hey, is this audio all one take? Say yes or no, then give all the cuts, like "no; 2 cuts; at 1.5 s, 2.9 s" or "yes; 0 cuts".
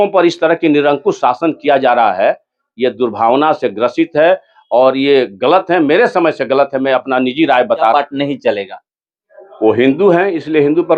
no; 1 cut; at 7.9 s